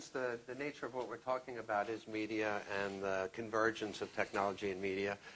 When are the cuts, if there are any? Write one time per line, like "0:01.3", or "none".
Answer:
none